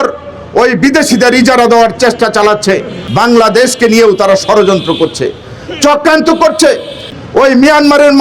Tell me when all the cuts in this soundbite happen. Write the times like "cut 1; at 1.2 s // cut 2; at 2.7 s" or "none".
cut 1; at 3.0 s // cut 2; at 7.1 s